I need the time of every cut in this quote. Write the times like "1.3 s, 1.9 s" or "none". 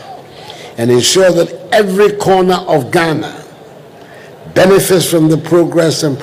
none